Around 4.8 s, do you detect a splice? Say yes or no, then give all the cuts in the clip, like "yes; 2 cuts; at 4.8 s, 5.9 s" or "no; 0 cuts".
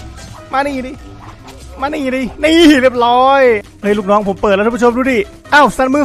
no; 1 cut; at 3.6 s